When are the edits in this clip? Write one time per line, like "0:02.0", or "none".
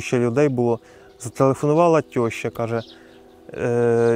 none